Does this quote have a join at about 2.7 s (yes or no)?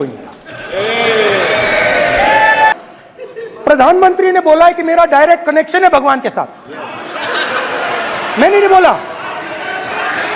yes